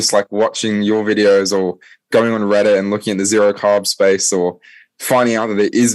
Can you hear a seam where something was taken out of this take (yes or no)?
no